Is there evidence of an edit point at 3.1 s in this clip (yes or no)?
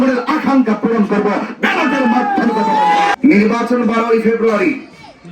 yes